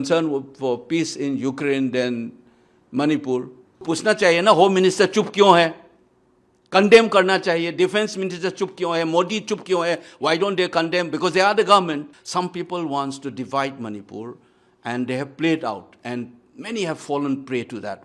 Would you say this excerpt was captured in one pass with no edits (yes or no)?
no